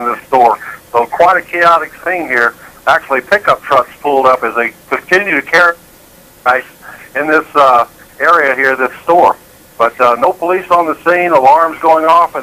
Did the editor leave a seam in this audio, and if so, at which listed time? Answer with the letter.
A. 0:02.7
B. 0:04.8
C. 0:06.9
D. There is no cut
C